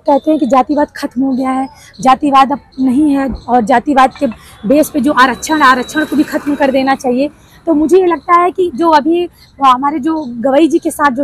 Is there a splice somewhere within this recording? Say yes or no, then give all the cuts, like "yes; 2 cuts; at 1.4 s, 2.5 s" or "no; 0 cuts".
no; 0 cuts